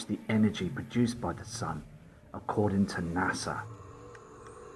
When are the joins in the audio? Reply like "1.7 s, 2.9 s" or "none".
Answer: 1.2 s